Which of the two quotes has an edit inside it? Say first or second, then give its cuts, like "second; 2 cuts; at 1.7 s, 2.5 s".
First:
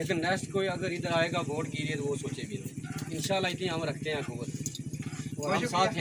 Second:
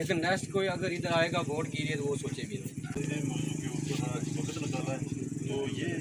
second; 1 cut; at 3.0 s